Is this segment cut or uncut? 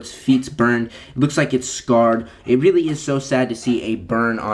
uncut